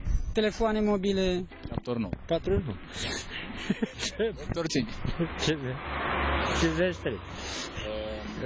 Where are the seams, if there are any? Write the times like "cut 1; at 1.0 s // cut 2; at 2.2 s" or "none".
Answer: cut 1; at 5.1 s